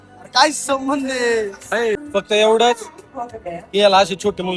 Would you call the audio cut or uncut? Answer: cut